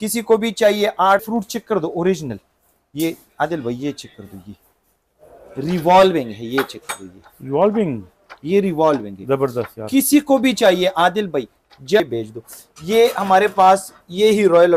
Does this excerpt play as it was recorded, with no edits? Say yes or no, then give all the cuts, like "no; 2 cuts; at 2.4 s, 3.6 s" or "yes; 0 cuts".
no; 2 cuts; at 1.2 s, 12.0 s